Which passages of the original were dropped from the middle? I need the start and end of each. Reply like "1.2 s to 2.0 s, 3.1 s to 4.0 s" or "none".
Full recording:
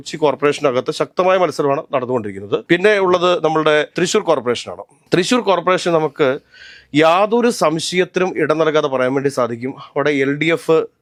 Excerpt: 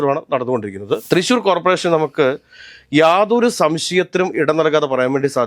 2.6 s to 5.0 s

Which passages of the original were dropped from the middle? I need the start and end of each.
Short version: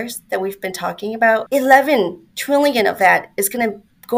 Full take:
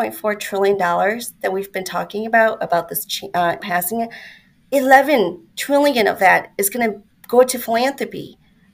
2.6 s to 4.7 s

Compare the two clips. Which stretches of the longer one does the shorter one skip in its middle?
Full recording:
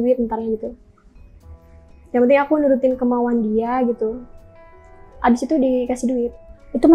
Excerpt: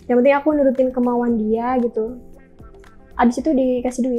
none

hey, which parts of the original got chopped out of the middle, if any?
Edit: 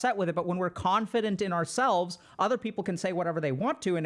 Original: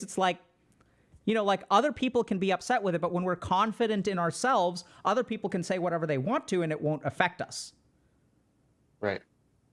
none

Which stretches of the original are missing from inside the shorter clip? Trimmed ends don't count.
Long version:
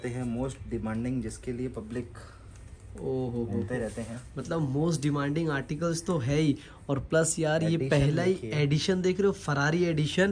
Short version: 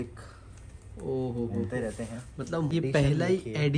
4.7 s to 7.7 s

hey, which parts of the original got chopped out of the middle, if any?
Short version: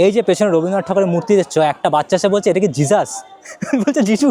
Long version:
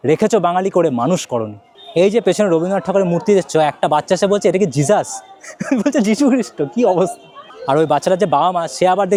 none

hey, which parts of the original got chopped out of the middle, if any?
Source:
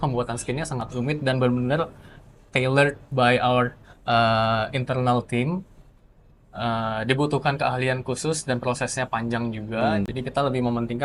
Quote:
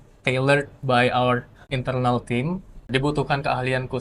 4.0 s to 4.7 s, 5.9 s to 7.0 s

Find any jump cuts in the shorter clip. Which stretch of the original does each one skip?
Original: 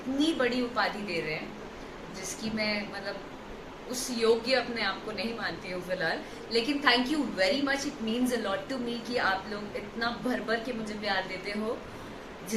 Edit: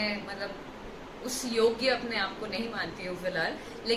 none

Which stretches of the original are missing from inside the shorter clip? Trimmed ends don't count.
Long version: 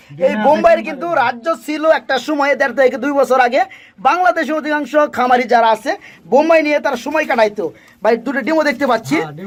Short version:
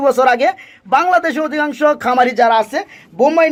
none

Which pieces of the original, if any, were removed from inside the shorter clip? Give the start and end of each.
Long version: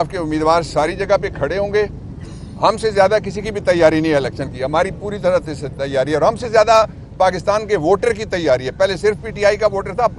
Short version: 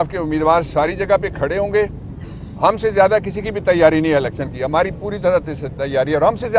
none

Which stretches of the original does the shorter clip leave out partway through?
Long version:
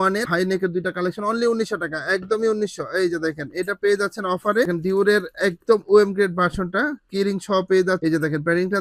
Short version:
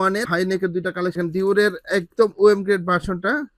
1.2 s to 4.7 s

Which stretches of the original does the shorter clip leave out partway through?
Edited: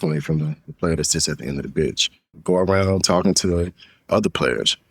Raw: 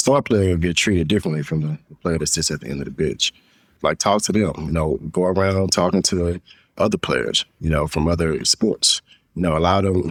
3.6 s to 5.1 s

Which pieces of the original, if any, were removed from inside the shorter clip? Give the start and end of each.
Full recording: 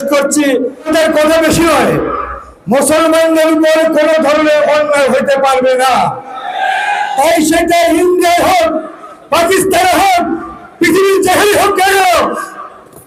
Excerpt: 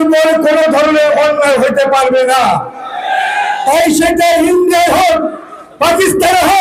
none

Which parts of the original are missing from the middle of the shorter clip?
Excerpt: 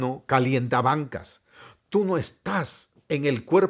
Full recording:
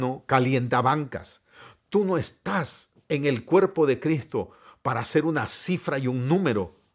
none

